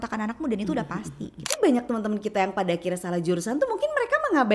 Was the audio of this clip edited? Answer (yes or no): yes